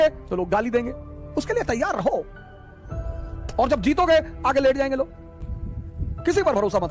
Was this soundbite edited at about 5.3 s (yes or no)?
yes